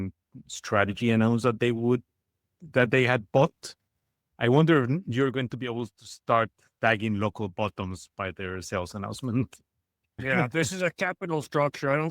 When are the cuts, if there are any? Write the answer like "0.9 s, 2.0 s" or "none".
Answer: 6.7 s, 10.2 s